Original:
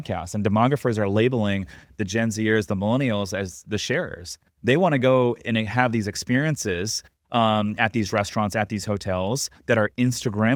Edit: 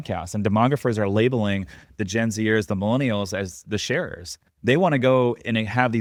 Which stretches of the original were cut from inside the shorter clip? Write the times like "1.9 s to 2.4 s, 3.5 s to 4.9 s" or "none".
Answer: none